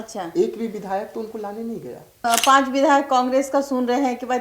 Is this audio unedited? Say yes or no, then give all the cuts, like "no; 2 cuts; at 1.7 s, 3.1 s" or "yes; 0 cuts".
no; 1 cut; at 2.2 s